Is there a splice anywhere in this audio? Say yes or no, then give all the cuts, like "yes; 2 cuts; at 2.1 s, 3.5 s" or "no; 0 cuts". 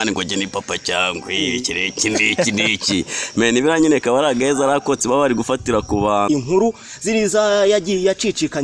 yes; 1 cut; at 6.3 s